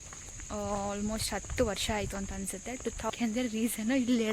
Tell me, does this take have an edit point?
yes; 1 cut; at 3.1 s

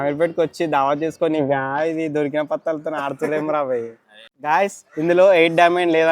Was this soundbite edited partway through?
yes; 1 cut; at 4.2 s

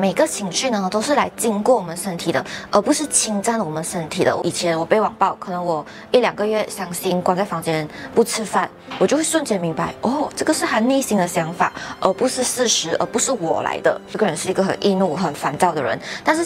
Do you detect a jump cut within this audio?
yes; 3 cuts; at 4.4 s, 8.8 s, 14.1 s

